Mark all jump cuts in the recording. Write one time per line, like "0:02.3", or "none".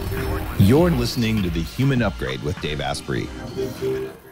none